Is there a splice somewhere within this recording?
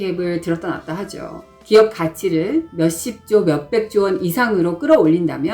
yes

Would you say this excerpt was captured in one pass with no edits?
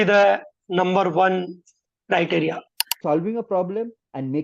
no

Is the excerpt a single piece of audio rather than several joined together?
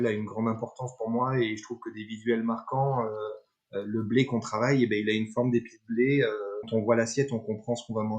no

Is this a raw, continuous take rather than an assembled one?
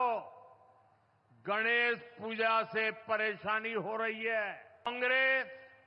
no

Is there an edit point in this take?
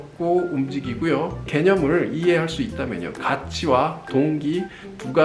yes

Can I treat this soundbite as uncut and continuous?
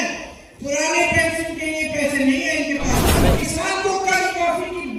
no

